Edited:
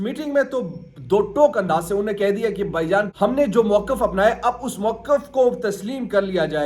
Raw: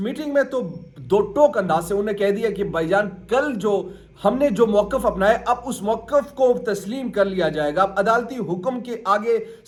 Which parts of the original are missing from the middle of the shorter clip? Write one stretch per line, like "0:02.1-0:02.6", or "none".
0:03.1-0:04.1